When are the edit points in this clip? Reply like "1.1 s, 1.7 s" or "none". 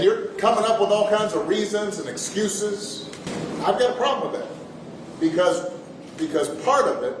3.3 s